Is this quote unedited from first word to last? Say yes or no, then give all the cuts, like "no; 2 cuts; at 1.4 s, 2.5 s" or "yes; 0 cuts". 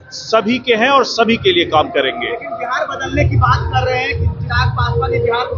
yes; 0 cuts